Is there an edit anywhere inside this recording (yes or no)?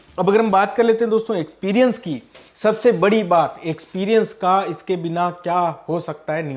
no